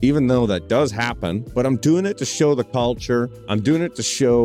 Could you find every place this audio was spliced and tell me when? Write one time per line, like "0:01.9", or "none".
0:01.4
0:03.1